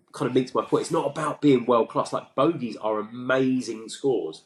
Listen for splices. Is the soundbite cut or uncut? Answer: uncut